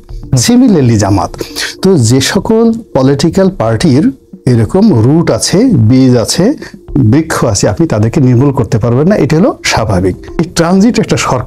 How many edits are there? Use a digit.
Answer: 1